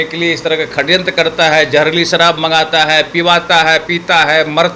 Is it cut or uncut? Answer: uncut